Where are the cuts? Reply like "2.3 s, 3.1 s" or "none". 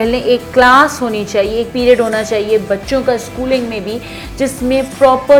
none